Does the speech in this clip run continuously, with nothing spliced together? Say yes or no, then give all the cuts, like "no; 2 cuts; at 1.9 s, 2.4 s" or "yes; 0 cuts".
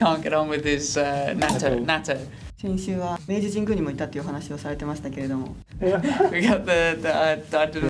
yes; 0 cuts